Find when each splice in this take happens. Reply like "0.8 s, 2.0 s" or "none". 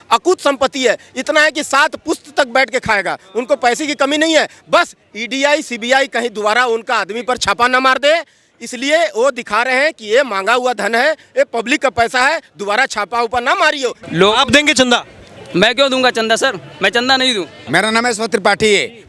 14.0 s, 17.6 s